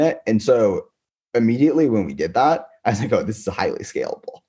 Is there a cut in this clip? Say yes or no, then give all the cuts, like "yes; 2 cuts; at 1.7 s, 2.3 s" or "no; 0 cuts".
no; 0 cuts